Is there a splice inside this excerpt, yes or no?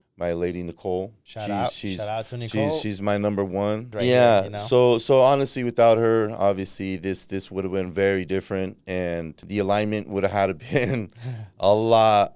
yes